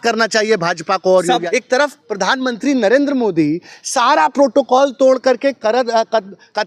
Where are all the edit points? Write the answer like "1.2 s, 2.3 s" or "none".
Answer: 1.4 s